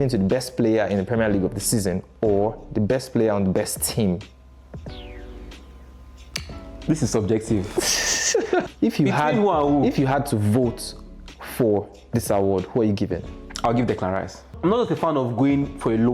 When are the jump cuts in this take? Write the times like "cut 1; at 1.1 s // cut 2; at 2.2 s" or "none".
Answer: cut 1; at 8.6 s // cut 2; at 14.5 s